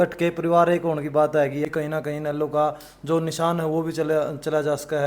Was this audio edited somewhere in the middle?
yes; 1 cut; at 1.7 s

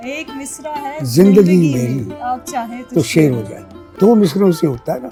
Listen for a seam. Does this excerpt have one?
no; 0 cuts

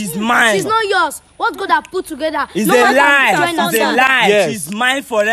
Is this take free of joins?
yes; 0 cuts

